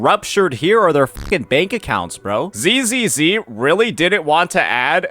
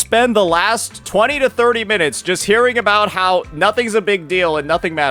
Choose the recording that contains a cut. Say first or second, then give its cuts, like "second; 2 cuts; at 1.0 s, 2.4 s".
first; 1 cut; at 2.5 s